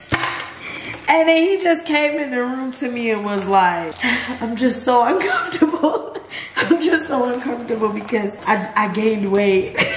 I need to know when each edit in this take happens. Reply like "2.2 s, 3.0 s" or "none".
3.9 s, 8.4 s